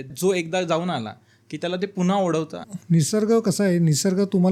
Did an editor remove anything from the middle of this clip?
no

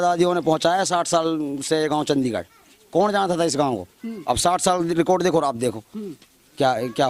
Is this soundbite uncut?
yes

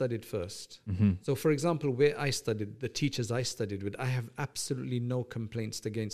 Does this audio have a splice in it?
no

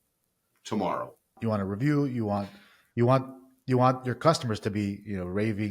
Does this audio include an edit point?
yes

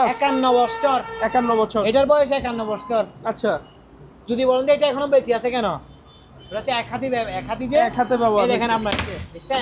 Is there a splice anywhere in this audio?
no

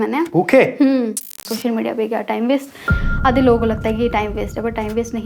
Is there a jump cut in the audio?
yes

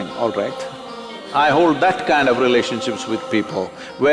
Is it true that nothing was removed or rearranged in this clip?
no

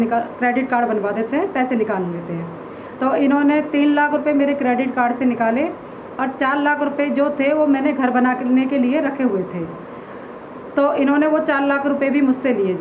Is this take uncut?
yes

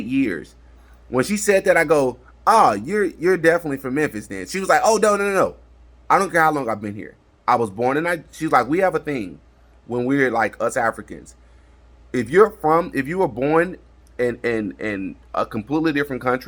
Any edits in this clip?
no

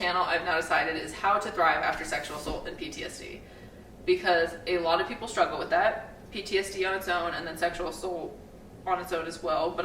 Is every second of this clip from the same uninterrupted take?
yes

